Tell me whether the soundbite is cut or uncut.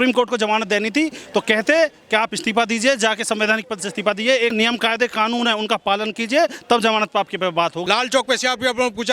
cut